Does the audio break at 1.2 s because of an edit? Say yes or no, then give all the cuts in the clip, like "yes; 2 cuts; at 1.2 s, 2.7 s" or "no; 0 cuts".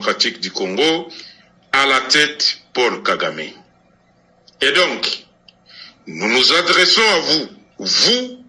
no; 0 cuts